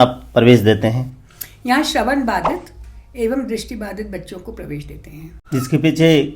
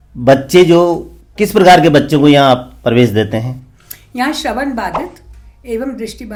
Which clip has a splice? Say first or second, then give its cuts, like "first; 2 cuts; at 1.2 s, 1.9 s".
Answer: first; 1 cut; at 5.4 s